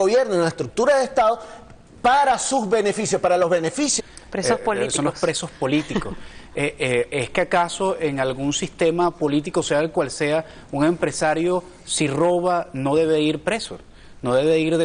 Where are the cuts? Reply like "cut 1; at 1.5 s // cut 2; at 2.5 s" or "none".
none